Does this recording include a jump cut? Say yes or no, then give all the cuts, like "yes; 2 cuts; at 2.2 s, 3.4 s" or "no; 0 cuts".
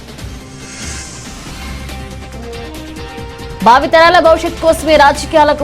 no; 0 cuts